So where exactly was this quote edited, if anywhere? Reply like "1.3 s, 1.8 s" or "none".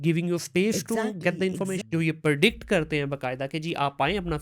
1.8 s

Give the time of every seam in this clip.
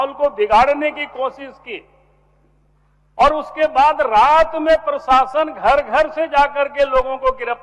none

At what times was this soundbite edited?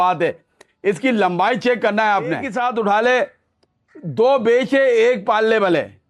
2.5 s

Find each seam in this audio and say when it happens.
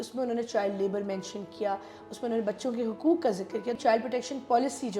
3.8 s

